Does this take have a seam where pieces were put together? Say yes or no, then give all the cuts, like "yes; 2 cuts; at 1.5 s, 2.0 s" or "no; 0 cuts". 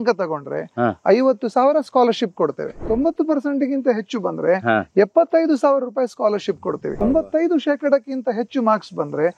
yes; 2 cuts; at 2.8 s, 7.0 s